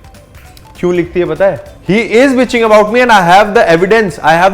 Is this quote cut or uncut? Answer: cut